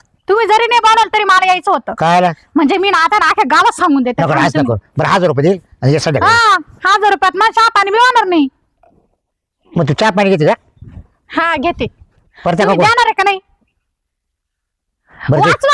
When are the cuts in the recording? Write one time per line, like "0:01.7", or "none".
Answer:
none